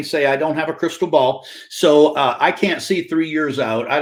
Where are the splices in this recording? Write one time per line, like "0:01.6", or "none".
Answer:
none